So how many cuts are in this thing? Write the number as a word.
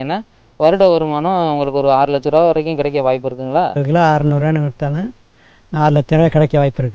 one